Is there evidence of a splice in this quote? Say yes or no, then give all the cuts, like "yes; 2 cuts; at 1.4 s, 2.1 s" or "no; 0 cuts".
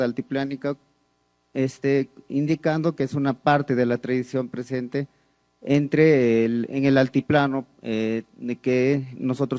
no; 0 cuts